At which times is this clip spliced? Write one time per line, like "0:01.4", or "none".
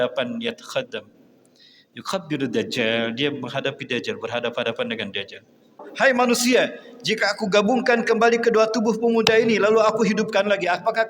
0:05.9